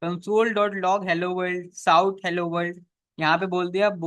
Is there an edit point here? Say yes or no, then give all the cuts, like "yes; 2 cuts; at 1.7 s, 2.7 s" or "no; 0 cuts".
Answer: no; 0 cuts